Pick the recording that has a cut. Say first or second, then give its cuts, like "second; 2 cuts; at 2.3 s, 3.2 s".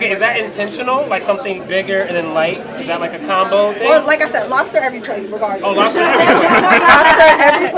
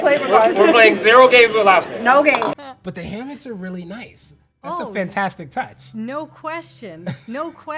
second; 1 cut; at 2.5 s